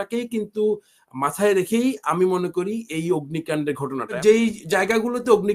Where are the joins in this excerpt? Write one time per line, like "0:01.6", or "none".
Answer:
0:04.2